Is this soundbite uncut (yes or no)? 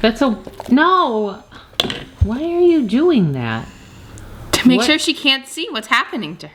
yes